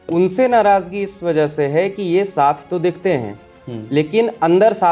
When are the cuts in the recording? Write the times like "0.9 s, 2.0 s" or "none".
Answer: none